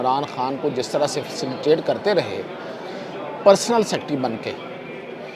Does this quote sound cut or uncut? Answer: uncut